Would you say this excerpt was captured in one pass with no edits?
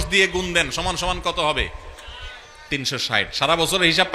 yes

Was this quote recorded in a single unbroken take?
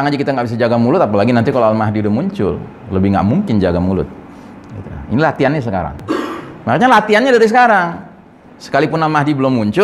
no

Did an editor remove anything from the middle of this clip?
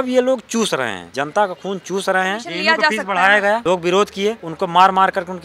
yes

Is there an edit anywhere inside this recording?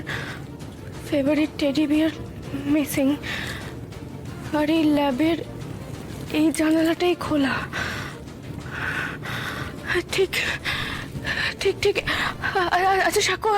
no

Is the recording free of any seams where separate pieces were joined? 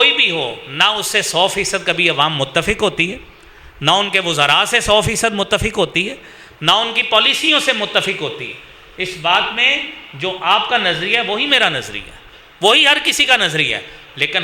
yes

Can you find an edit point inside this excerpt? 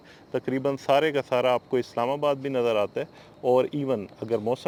no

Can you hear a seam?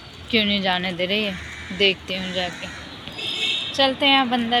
no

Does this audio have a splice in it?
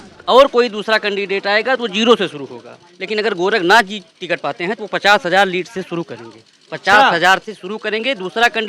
no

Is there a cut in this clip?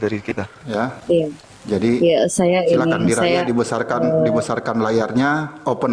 yes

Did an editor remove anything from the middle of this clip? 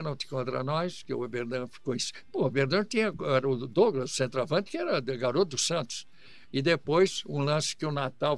no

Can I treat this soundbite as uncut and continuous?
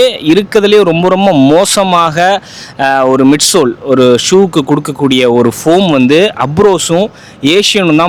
yes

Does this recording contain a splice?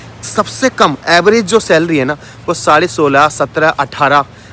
no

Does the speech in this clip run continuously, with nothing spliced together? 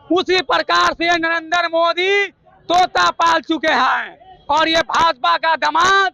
yes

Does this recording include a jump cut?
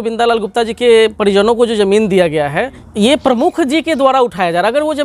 yes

